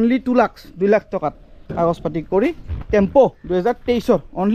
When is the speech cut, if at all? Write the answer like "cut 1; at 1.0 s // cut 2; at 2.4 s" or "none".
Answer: none